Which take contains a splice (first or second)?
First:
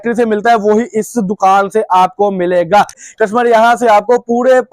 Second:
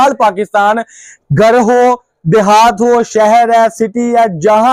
first